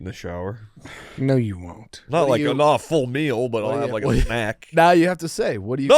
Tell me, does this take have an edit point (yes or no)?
yes